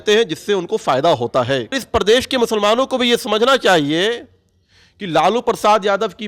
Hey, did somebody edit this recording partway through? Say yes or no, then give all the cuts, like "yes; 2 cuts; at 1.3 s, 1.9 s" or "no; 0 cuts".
yes; 1 cut; at 1.8 s